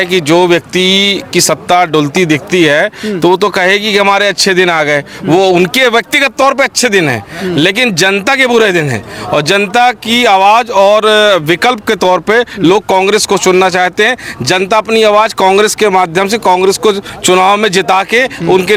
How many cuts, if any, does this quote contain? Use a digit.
0